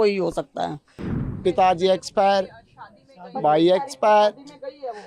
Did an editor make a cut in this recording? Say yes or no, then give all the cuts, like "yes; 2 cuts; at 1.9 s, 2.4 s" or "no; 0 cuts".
yes; 1 cut; at 1.2 s